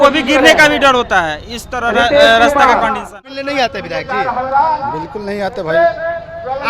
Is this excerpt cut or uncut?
cut